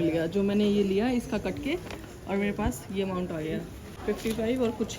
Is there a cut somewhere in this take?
yes; 1 cut; at 3.8 s

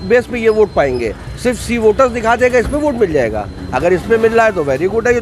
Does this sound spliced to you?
no; 0 cuts

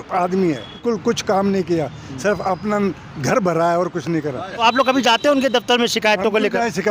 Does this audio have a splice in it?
yes; 2 cuts; at 0.8 s, 4.6 s

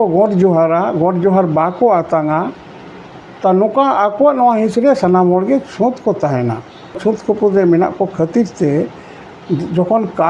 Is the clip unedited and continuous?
no; 1 cut; at 7.0 s

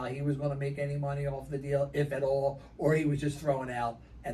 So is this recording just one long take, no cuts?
yes; 0 cuts

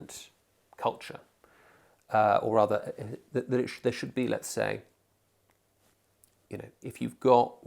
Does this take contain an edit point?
no; 0 cuts

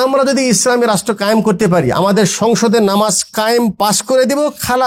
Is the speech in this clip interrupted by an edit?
no; 0 cuts

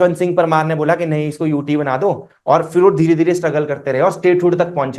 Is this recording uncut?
yes; 0 cuts

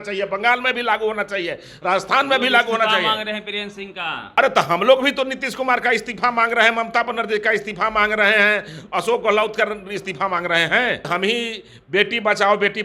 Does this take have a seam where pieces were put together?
yes; 2 cuts; at 4.3 s, 11.1 s

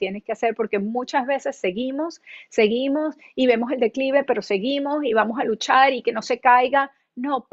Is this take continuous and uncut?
yes; 0 cuts

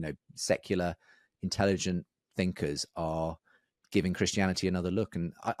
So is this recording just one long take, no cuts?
yes; 0 cuts

